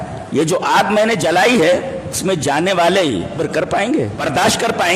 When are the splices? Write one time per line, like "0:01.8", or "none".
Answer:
0:02.2
0:03.4
0:04.2